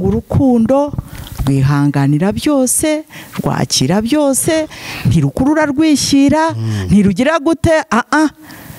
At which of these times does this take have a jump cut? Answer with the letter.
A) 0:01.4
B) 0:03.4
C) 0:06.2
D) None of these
D